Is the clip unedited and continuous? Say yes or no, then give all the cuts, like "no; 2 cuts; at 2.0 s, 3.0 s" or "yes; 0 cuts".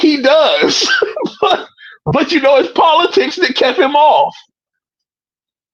yes; 0 cuts